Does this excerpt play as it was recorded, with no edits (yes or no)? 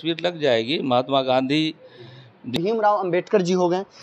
no